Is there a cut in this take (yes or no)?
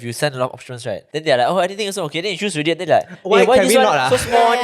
yes